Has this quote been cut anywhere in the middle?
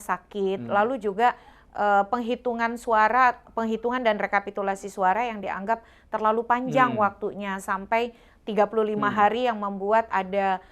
no; 0 cuts

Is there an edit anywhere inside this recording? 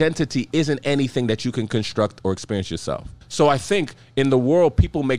yes; 1 cut; at 3.2 s

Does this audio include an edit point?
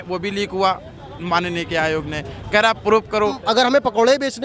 yes; 1 cut; at 3.4 s

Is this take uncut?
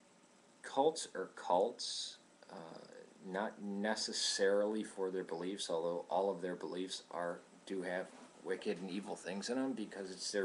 yes; 0 cuts

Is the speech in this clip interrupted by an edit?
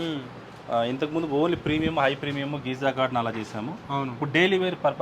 no; 0 cuts

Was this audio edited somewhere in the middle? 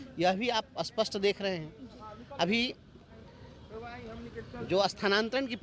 no; 0 cuts

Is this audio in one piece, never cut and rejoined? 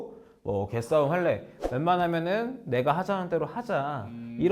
yes; 0 cuts

